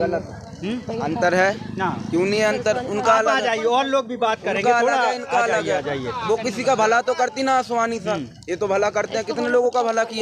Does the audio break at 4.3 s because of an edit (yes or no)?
no